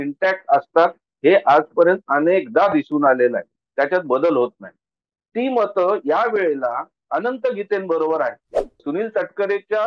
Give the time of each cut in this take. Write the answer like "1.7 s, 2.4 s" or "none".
8.8 s